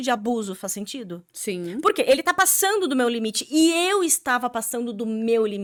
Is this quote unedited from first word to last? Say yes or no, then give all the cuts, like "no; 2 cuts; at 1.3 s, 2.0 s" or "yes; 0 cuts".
yes; 0 cuts